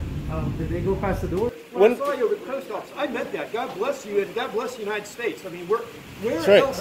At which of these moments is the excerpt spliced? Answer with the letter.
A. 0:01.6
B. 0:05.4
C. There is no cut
A